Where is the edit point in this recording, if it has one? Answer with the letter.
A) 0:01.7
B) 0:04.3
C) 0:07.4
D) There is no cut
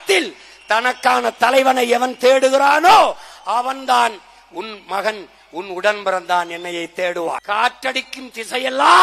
C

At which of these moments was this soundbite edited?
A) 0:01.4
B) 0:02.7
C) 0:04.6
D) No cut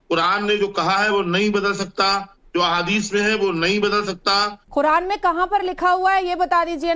C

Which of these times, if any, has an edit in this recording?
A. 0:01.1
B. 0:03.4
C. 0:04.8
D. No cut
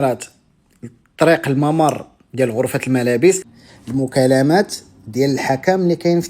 B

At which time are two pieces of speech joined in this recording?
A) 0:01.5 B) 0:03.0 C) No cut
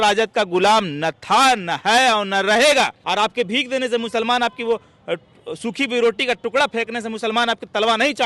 B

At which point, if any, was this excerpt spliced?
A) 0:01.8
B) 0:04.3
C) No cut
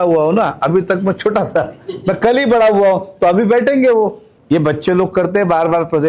B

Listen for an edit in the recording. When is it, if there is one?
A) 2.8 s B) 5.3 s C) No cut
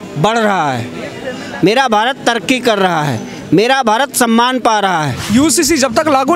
B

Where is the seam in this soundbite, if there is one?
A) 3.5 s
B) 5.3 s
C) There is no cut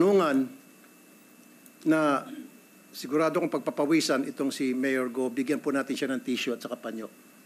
C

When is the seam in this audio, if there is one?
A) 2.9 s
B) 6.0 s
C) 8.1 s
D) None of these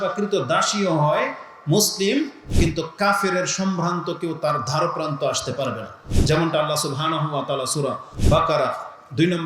C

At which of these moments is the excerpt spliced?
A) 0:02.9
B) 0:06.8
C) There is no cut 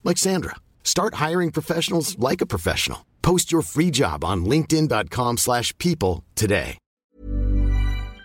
B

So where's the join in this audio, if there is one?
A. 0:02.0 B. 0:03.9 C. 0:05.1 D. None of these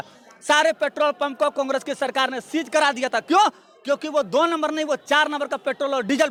D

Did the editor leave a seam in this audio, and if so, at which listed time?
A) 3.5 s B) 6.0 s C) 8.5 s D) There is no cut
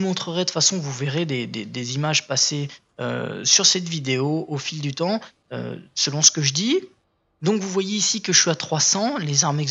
D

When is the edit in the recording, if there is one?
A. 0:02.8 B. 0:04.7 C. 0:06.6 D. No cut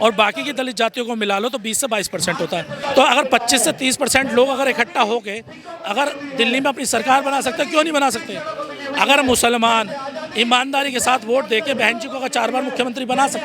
A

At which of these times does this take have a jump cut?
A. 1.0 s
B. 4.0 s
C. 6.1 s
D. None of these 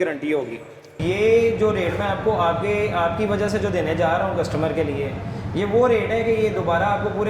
A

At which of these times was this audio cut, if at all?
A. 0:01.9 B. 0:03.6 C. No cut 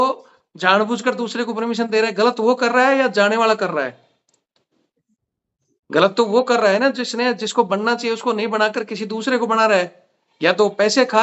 C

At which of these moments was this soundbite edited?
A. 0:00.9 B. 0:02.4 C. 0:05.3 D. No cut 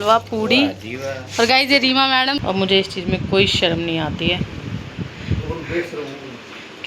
B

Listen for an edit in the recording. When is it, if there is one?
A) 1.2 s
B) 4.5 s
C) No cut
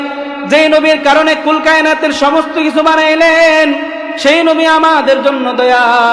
C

